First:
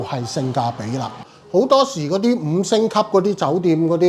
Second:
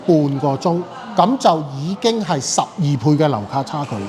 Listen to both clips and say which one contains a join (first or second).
first